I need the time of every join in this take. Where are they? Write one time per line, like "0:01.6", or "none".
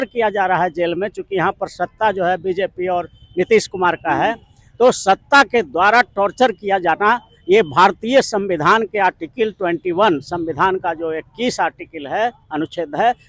none